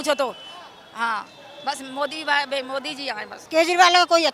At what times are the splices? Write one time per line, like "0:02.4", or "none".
0:03.3